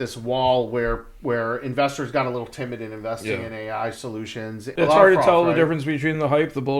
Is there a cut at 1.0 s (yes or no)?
no